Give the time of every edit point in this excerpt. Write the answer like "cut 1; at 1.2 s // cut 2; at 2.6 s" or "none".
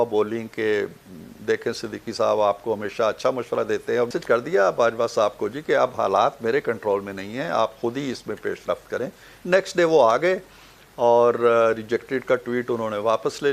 cut 1; at 4.2 s